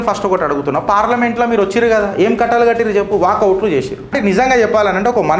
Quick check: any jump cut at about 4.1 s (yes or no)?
yes